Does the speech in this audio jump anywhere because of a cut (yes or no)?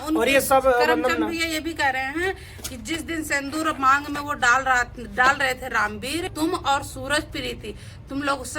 yes